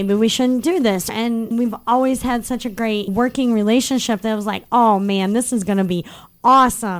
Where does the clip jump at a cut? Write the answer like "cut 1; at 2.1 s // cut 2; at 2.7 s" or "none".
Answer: cut 1; at 1.1 s // cut 2; at 3.1 s